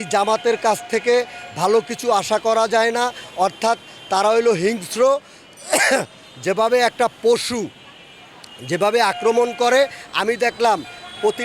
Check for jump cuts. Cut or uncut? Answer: uncut